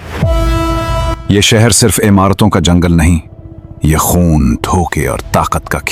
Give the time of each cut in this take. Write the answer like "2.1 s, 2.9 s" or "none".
none

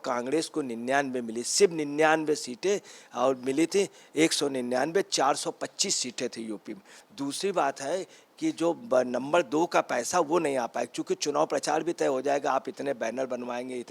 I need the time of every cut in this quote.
7.0 s

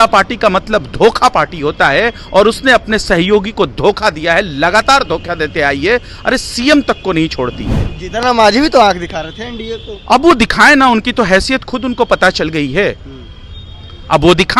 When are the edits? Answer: none

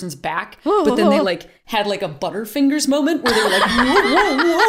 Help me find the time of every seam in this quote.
none

